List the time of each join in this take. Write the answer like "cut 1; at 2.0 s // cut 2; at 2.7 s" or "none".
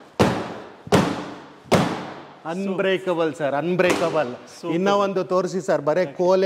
none

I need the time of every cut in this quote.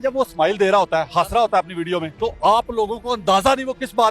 cut 1; at 2.1 s

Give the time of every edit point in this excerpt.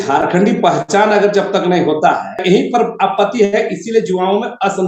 cut 1; at 2.4 s

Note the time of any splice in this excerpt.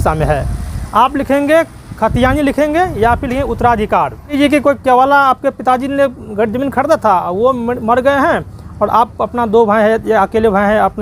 cut 1; at 4.3 s

